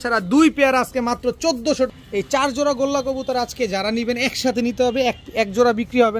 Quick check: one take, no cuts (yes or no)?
no